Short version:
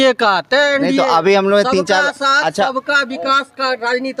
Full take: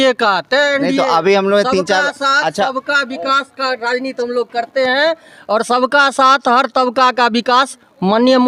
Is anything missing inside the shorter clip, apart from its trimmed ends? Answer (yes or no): no